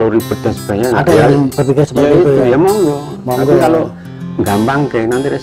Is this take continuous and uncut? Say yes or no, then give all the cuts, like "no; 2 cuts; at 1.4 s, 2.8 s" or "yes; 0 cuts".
yes; 0 cuts